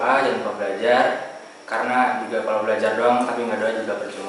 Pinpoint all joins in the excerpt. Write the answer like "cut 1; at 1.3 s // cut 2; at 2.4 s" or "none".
none